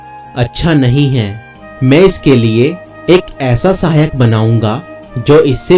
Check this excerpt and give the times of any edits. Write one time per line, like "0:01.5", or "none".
none